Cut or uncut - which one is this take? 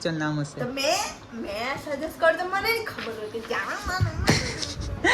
uncut